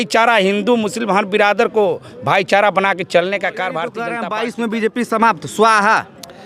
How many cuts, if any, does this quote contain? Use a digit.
1